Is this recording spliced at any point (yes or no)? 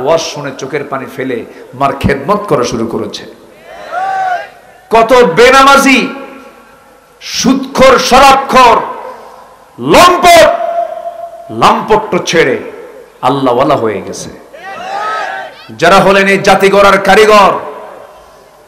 no